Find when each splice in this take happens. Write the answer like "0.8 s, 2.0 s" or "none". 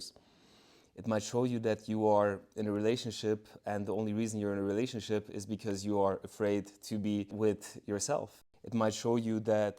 8.4 s